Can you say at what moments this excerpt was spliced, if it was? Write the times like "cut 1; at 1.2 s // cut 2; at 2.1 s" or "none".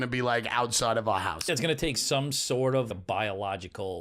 cut 1; at 1.5 s // cut 2; at 2.9 s